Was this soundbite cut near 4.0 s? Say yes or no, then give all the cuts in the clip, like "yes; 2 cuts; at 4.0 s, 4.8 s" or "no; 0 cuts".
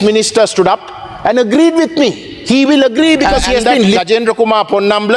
yes; 1 cut; at 4.0 s